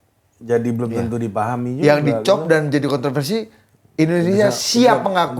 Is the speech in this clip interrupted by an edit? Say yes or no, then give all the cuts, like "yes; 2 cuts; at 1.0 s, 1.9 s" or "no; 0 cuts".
no; 0 cuts